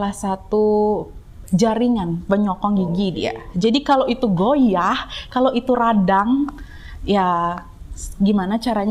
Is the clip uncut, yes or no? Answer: yes